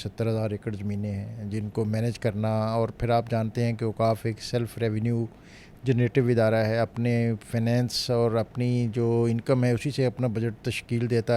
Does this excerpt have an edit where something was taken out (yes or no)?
no